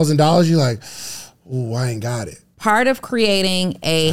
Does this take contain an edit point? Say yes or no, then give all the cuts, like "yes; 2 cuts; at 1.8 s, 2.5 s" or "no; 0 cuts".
yes; 1 cut; at 2.4 s